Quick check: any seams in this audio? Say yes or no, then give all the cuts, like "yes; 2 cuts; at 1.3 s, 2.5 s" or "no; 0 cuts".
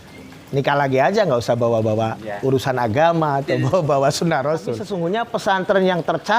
yes; 1 cut; at 4.9 s